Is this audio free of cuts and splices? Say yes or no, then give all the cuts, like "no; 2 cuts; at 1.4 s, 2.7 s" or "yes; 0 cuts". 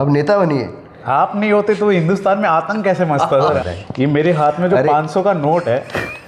no; 2 cuts; at 1.0 s, 3.6 s